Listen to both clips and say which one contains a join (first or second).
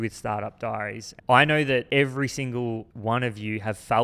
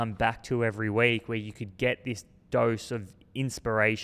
first